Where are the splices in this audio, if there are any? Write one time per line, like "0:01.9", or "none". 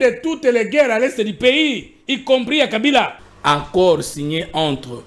0:03.2

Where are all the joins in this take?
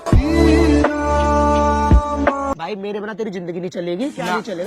0:02.5

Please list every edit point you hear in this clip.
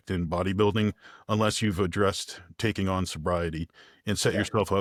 none

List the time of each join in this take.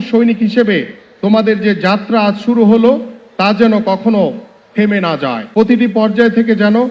0:05.4

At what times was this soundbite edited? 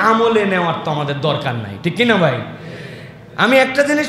none

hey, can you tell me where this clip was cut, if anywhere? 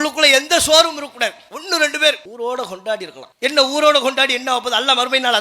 0:01.5
0:03.2

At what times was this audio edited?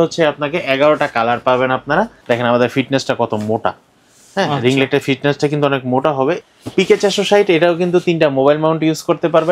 0:02.2
0:06.4

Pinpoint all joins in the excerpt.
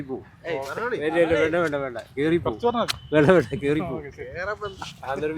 none

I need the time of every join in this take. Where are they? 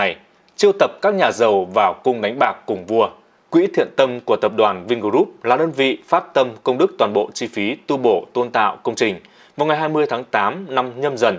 0:03.3

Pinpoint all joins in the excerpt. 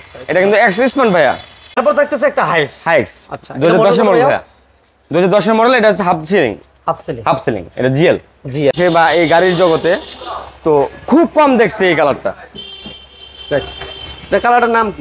0:01.6
0:08.7

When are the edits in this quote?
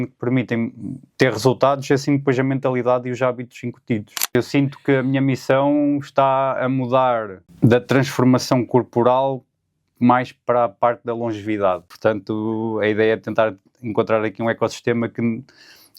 0:04.4
0:07.4
0:11.9

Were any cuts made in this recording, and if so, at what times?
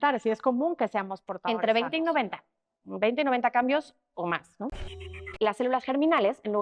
0:05.0

